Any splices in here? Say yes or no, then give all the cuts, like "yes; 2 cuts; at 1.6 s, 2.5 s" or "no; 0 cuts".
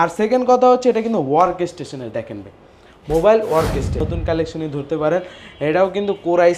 yes; 1 cut; at 4.1 s